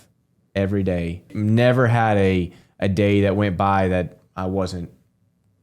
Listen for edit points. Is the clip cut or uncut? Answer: cut